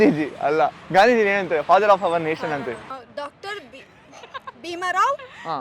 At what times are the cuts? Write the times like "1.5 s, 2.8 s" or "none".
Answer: 2.9 s